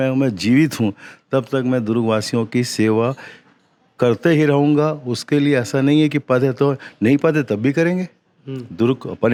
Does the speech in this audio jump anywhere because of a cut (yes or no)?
no